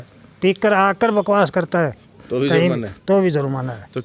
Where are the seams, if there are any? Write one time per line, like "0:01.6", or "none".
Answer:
none

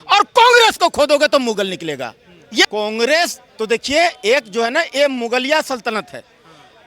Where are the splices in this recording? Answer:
0:02.7

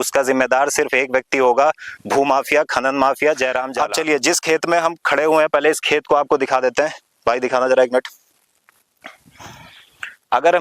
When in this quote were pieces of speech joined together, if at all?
none

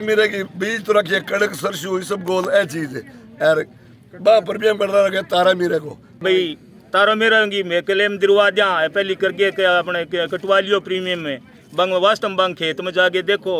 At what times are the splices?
0:06.2

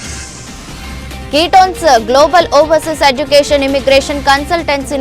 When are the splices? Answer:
0:01.2

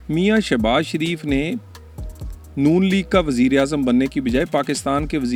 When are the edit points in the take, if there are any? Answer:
none

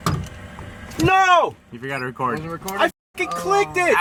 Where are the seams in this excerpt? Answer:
none

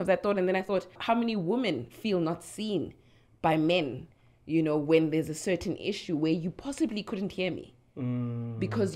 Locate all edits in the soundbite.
0:00.9

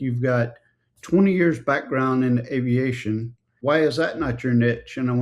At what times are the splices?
0:03.4

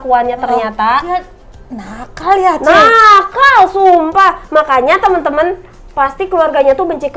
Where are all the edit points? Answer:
0:01.1

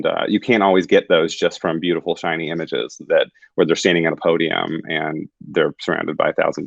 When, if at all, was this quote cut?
none

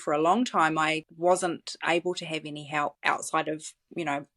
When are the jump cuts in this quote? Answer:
0:01.1
0:03.0

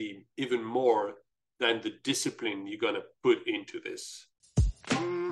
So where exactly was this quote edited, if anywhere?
0:04.4

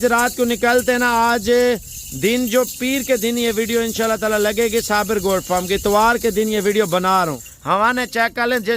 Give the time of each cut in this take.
0:07.5

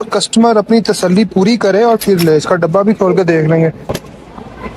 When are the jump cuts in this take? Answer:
0:03.9

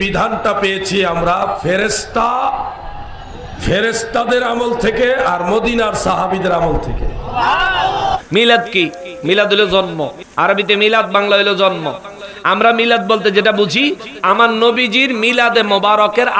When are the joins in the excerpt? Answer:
0:08.2

